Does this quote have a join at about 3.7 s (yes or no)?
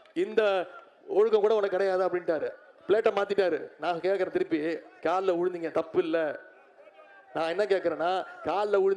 no